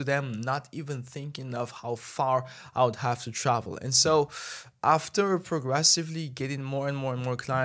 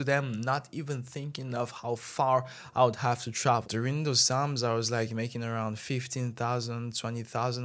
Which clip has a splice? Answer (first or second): second